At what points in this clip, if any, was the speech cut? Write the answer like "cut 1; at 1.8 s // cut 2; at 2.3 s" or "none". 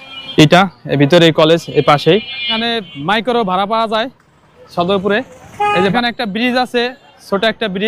cut 1; at 2.6 s // cut 2; at 5.9 s